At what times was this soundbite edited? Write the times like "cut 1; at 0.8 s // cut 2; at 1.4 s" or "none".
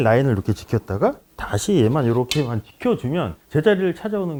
none

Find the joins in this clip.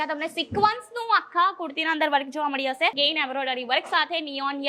cut 1; at 2.9 s

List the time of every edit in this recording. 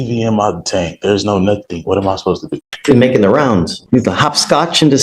cut 1; at 2.7 s

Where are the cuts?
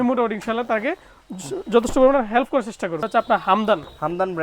cut 1; at 3.1 s

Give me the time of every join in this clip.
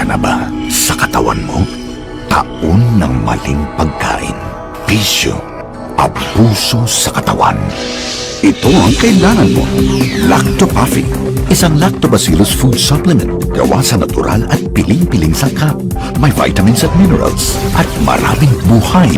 none

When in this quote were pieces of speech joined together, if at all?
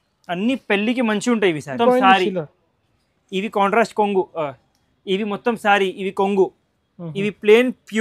cut 1; at 1.8 s

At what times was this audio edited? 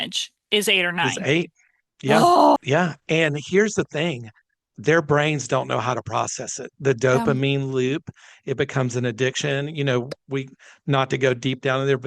cut 1; at 2.6 s

